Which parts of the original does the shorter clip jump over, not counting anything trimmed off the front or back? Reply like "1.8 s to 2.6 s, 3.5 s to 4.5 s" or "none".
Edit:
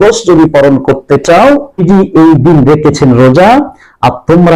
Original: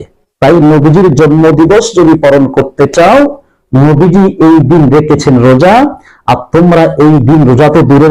3.1 s to 3.6 s